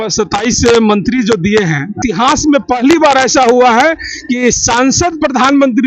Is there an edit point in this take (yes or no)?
yes